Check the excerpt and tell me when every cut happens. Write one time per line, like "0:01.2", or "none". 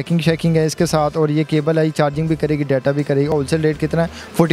0:03.3